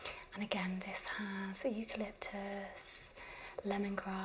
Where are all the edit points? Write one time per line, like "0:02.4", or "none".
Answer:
none